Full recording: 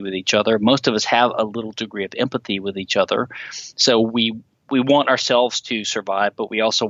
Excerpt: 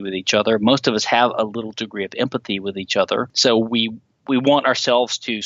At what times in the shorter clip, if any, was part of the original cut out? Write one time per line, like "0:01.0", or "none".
0:03.3

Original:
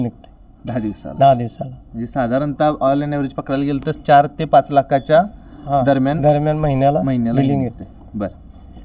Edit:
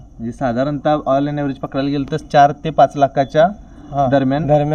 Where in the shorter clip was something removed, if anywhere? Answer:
none

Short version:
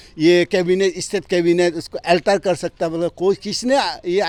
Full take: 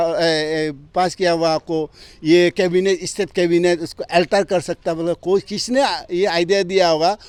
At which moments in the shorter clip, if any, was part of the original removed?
none

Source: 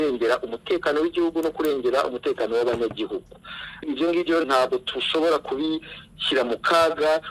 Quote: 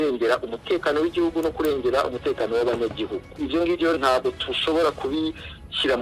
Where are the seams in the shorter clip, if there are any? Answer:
0:03.3

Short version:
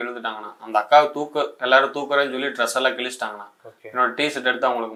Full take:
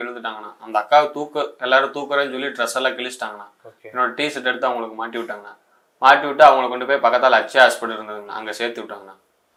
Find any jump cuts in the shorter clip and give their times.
none

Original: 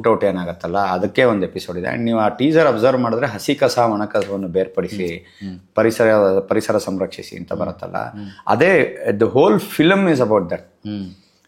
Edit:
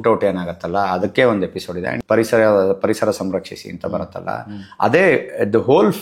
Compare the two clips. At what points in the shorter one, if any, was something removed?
0:02.0

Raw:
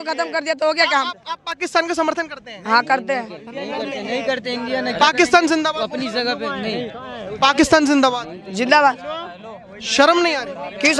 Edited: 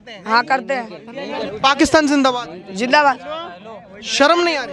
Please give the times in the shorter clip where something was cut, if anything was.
0:01.5

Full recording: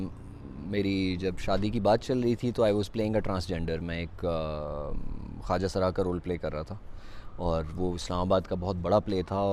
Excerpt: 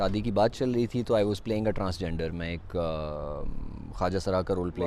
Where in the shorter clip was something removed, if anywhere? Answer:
none

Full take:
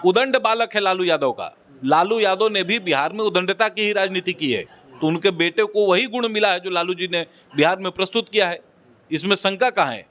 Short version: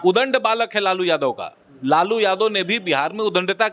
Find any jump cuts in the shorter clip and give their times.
none

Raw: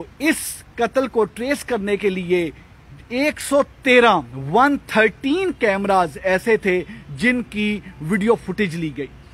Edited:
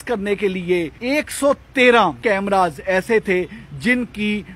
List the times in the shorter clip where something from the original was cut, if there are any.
0:00.9
0:02.2

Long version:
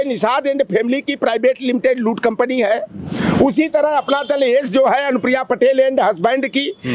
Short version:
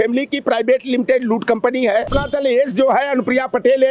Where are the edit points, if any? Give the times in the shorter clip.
0:02.1

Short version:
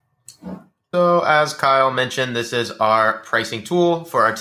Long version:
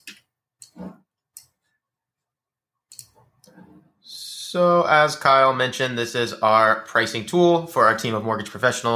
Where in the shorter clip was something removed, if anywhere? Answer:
0:00.9

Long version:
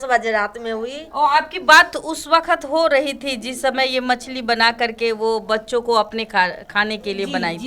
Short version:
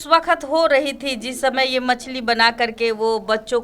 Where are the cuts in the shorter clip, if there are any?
none

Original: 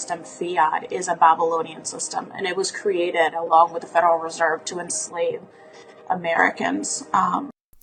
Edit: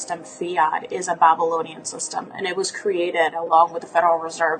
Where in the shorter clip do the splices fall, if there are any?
none

